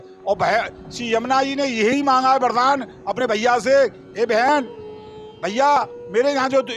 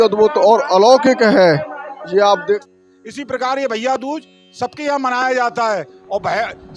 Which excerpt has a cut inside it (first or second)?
second